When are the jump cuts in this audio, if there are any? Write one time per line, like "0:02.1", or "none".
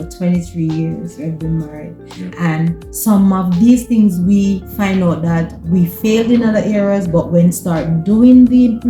none